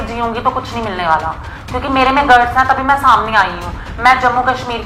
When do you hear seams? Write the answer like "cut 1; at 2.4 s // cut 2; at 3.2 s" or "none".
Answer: none